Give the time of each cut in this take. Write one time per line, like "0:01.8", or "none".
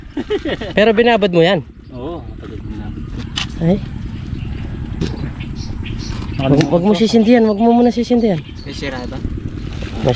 none